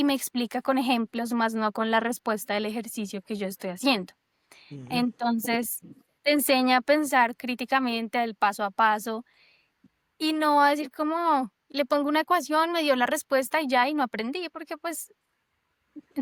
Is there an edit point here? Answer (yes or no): no